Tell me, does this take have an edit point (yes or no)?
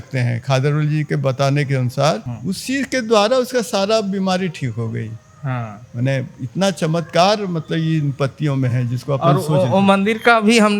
yes